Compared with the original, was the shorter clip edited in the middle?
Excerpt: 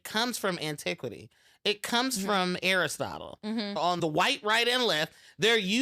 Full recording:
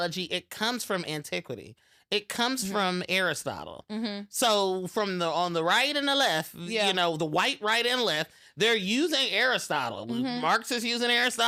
yes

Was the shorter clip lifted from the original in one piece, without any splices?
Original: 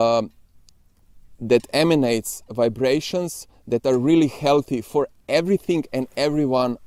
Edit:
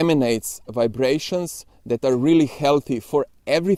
yes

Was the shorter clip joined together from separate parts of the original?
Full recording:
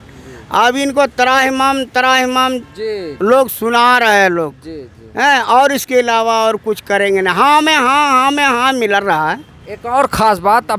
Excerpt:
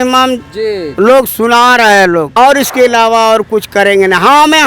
yes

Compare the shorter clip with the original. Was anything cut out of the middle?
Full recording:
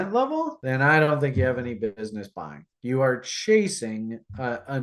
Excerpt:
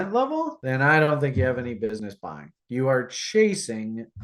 yes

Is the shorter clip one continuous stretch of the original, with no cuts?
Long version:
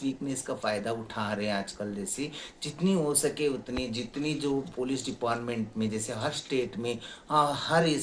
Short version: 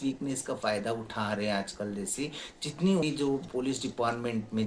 no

